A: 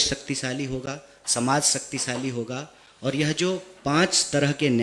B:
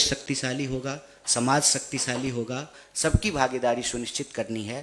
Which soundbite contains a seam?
B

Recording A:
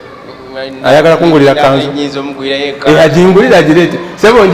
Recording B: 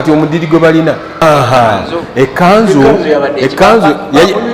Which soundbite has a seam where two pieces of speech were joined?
B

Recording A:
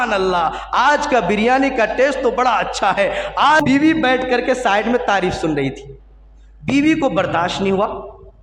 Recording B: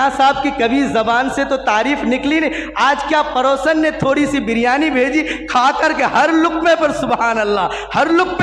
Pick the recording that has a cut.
A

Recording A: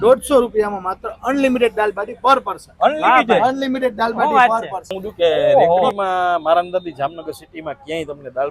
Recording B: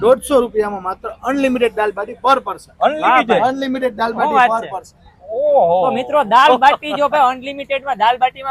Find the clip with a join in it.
A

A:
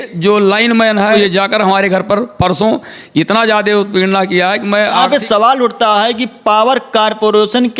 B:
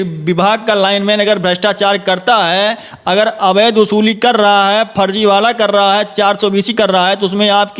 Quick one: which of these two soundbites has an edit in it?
A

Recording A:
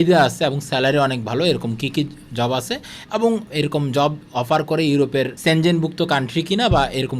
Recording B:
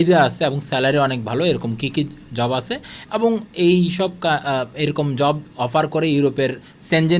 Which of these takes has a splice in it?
A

